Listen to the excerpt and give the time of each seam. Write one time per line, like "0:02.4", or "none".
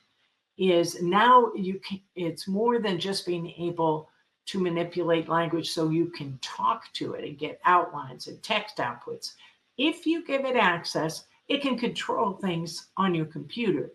none